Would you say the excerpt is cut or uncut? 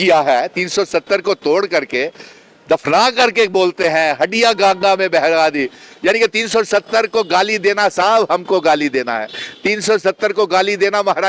uncut